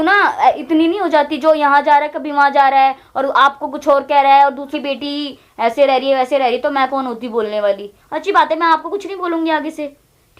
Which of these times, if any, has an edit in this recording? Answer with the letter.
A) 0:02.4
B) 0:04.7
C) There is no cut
B